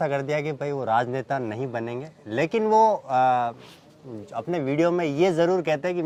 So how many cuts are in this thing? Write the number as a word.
zero